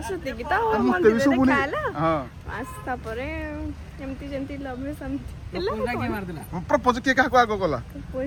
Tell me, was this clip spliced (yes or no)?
no